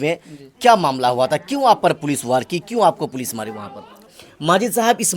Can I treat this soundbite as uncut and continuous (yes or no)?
no